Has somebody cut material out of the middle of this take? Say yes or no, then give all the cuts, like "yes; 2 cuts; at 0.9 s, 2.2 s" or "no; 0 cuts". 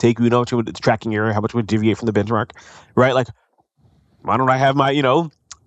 no; 0 cuts